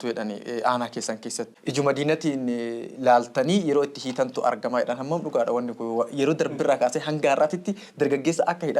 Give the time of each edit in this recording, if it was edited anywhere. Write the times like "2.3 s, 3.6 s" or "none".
1.5 s